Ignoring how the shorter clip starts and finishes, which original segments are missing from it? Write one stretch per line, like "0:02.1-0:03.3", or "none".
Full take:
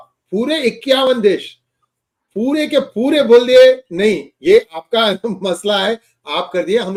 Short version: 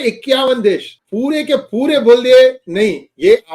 0:01.6-0:02.2